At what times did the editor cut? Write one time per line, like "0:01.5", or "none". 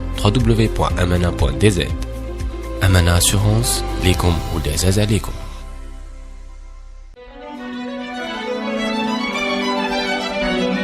0:07.0